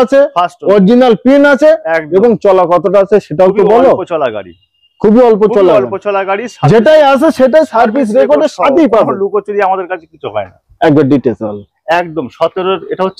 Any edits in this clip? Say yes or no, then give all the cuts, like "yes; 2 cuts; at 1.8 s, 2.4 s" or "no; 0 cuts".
no; 0 cuts